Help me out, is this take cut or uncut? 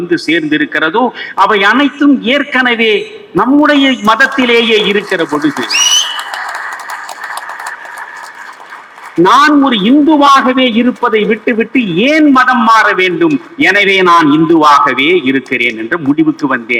uncut